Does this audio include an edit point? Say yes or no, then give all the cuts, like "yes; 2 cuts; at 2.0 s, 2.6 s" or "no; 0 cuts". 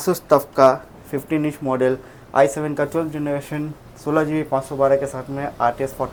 no; 0 cuts